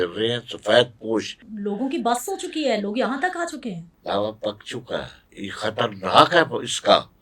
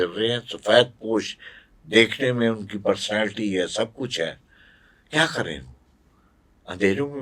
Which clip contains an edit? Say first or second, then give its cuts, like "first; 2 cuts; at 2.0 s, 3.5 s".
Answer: first; 3 cuts; at 1.4 s, 3.9 s, 5.2 s